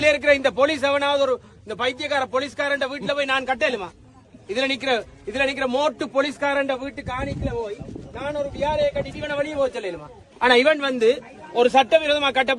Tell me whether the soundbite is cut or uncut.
uncut